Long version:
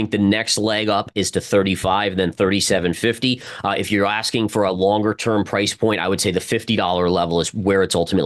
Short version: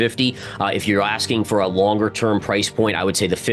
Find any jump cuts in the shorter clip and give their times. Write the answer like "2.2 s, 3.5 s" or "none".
none